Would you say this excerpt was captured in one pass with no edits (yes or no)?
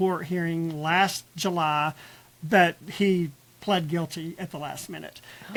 yes